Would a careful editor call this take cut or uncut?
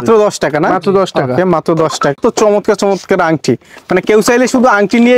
cut